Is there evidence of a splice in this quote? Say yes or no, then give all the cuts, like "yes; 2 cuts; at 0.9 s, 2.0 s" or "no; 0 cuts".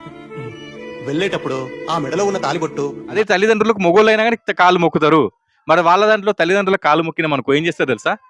yes; 1 cut; at 3.2 s